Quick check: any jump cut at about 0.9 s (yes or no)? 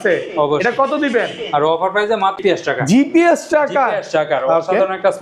no